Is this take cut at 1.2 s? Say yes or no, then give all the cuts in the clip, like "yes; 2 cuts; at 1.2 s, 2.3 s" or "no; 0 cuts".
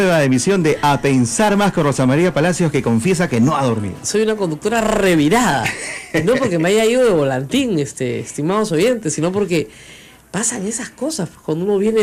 no; 0 cuts